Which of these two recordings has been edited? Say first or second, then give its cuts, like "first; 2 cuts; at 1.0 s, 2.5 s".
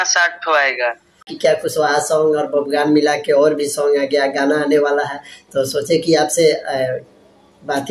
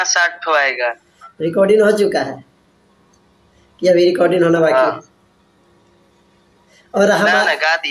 first; 1 cut; at 1.3 s